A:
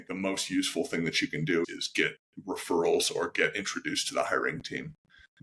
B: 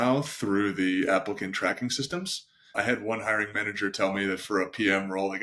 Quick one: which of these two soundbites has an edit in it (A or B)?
A